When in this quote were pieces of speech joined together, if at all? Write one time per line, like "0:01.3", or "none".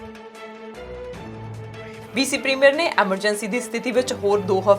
0:02.0